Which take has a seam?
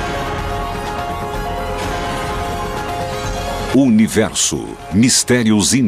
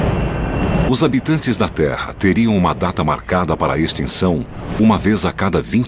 first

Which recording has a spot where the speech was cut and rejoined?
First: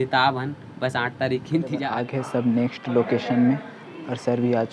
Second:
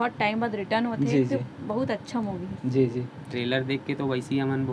first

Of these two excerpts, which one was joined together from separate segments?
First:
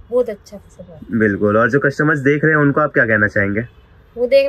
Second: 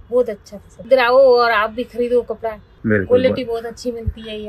second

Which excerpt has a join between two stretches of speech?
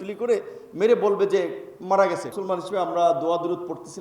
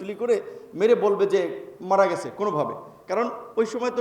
first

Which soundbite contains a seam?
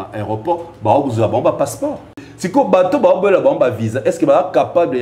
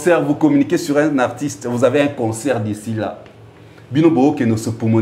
first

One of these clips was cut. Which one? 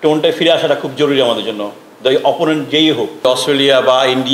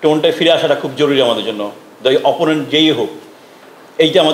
first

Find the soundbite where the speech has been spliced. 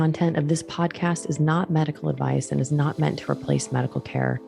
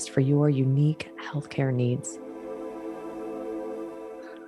second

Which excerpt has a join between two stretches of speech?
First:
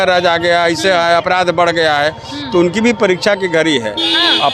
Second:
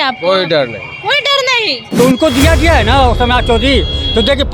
second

